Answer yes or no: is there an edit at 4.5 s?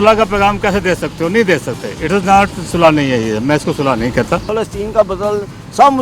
yes